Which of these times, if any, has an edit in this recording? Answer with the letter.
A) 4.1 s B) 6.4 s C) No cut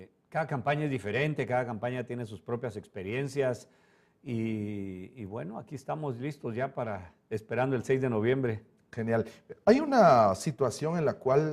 A